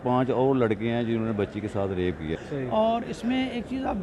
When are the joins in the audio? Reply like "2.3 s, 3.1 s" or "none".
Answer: 2.3 s